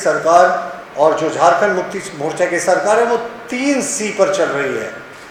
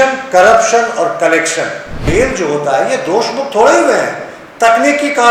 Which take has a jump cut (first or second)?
second